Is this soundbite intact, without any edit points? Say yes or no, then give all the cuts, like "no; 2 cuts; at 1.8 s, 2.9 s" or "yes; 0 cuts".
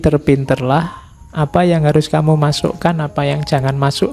yes; 0 cuts